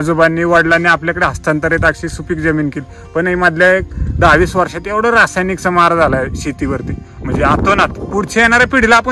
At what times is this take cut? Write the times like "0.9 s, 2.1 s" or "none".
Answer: 8.0 s